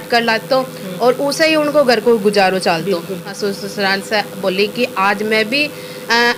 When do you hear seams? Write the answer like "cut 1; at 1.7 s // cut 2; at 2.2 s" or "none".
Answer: cut 1; at 3.3 s